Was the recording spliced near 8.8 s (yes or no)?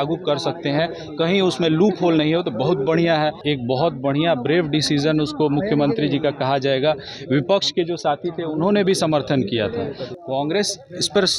no